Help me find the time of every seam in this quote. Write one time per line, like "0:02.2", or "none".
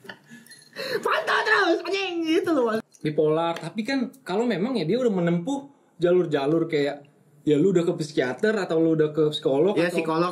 0:02.8